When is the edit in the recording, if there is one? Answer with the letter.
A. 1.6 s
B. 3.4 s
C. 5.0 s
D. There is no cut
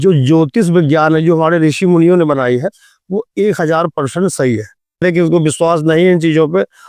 C